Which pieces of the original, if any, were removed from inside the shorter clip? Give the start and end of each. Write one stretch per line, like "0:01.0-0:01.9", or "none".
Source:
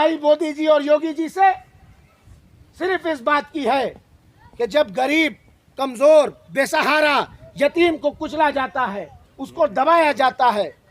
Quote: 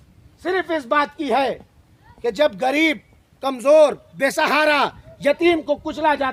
none